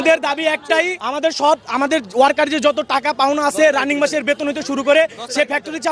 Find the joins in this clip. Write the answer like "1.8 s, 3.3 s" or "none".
1.0 s